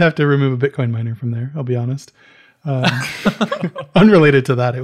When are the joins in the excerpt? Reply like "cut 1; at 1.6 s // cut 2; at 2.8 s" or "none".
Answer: none